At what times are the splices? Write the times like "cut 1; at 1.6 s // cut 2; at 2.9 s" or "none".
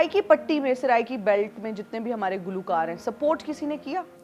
none